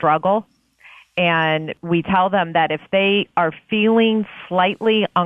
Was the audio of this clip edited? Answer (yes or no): yes